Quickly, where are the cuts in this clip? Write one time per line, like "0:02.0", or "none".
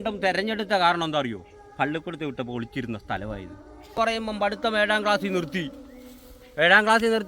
0:03.9